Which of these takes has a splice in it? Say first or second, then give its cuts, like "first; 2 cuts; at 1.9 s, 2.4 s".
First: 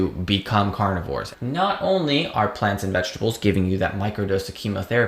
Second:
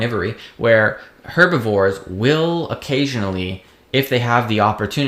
first; 1 cut; at 1.3 s